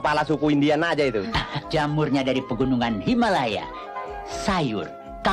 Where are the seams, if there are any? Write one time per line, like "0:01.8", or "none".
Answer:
0:01.4
0:04.1